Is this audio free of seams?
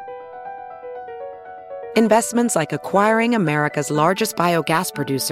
yes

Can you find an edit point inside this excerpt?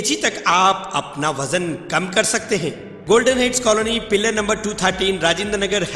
yes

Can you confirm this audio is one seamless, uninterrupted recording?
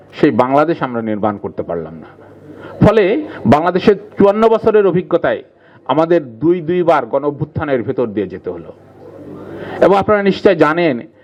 yes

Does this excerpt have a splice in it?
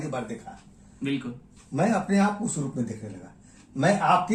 no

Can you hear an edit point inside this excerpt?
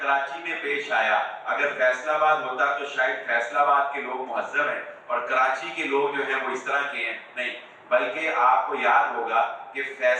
no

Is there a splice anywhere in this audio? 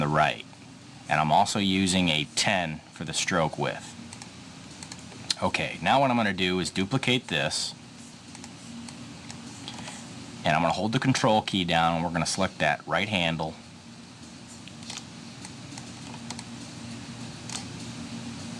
yes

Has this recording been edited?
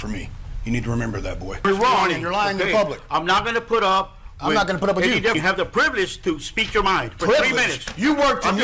yes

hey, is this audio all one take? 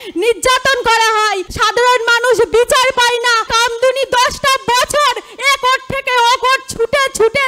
no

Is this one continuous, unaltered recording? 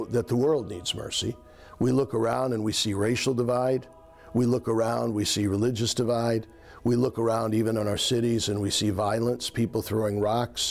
yes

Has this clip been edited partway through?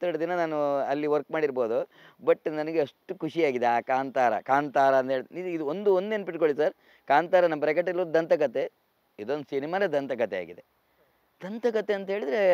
no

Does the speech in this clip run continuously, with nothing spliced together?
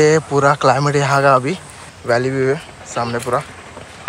no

